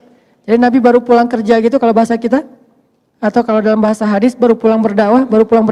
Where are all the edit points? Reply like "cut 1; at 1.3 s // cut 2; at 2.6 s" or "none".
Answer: none